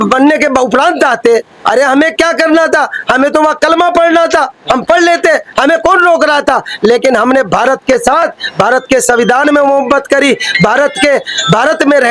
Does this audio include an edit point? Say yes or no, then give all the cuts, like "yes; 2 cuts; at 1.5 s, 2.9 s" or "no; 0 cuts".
no; 0 cuts